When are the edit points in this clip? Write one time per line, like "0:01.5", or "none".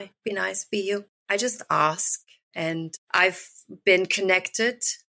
0:01.1
0:02.8